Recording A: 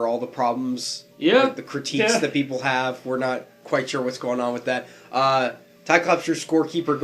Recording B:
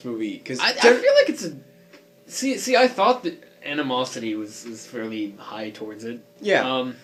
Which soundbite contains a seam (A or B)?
A